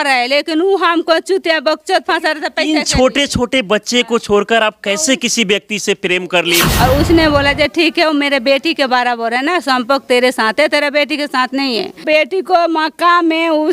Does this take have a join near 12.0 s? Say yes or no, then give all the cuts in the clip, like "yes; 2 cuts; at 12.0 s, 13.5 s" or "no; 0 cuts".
yes; 2 cuts; at 6.7 s, 12.0 s